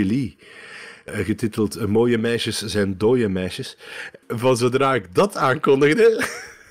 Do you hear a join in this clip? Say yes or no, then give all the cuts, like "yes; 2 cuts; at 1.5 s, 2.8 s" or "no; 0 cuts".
yes; 2 cuts; at 1.0 s, 4.2 s